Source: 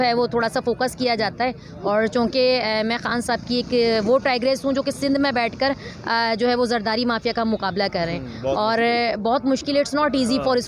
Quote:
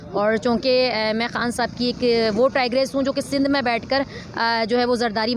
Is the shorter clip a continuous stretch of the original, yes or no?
yes